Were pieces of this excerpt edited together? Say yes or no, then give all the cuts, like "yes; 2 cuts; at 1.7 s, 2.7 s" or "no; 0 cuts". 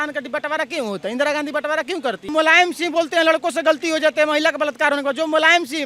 yes; 1 cut; at 2.3 s